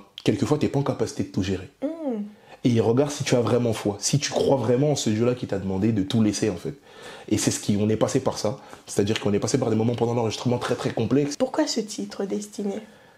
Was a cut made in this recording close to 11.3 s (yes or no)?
yes